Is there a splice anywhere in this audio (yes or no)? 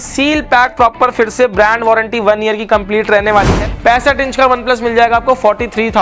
yes